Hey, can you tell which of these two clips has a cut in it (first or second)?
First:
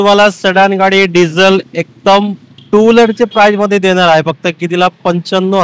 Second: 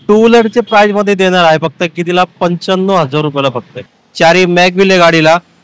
second